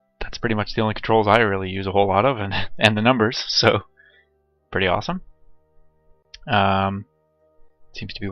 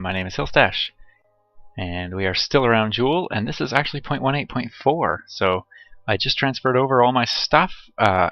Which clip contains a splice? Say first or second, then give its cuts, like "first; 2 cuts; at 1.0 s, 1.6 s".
first; 1 cut; at 5.3 s